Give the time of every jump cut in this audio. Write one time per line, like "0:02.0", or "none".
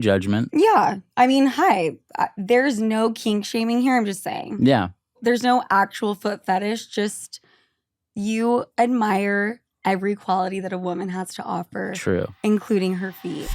0:05.2